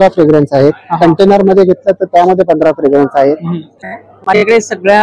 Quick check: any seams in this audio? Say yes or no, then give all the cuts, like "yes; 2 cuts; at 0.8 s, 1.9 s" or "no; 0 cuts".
yes; 1 cut; at 3.8 s